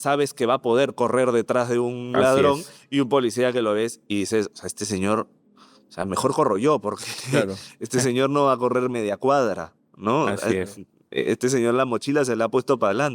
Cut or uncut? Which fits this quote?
uncut